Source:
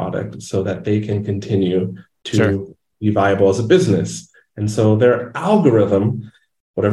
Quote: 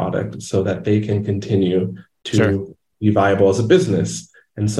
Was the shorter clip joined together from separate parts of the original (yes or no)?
no